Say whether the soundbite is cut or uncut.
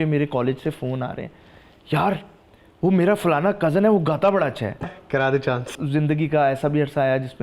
cut